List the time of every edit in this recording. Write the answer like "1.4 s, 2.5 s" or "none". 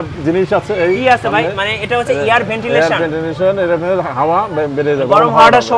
none